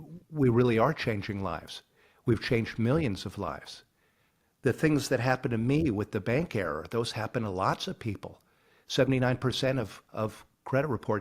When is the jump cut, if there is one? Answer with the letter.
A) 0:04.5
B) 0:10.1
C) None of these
A